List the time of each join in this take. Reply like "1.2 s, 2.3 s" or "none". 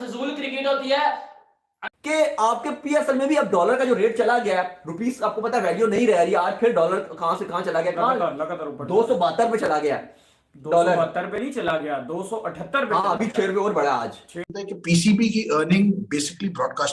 1.8 s, 14.5 s